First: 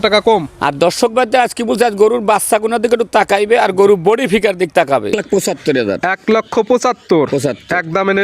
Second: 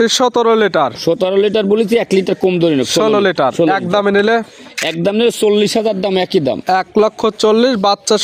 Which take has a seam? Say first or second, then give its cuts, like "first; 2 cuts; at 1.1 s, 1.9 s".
first; 1 cut; at 5.1 s